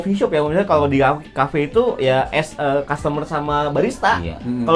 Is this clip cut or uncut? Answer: uncut